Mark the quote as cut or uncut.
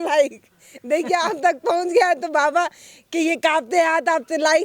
uncut